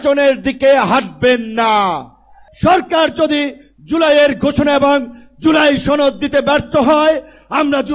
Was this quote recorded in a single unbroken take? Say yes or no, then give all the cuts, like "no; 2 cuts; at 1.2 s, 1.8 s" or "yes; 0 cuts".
no; 1 cut; at 2.4 s